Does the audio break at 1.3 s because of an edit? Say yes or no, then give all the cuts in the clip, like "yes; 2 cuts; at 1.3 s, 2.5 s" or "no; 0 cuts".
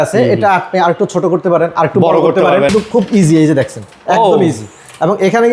no; 1 cut; at 2.7 s